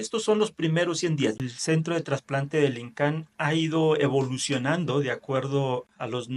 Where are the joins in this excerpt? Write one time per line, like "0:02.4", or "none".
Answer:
0:01.4